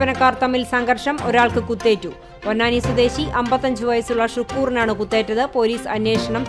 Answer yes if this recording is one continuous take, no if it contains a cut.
yes